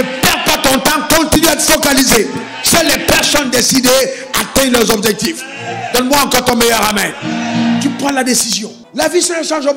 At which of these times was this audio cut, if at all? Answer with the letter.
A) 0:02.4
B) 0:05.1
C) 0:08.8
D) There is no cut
C